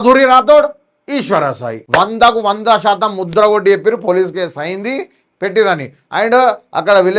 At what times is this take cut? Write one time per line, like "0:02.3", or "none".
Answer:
0:01.8

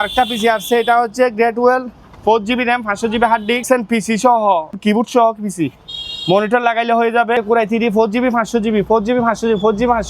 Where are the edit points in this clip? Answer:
0:03.6
0:04.7
0:07.4

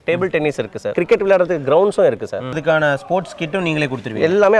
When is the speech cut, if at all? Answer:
0:00.9
0:02.6

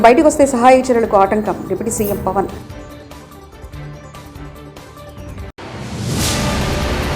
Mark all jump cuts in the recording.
0:02.8
0:05.5

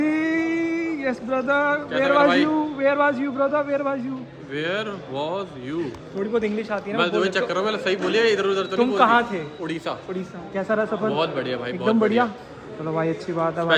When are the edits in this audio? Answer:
none

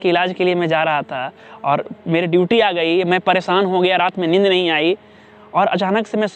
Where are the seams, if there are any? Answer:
none

